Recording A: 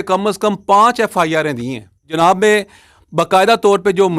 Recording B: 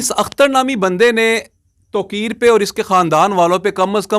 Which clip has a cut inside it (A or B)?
A